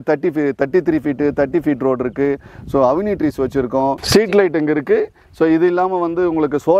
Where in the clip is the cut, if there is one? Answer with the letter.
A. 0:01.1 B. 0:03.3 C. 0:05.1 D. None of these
D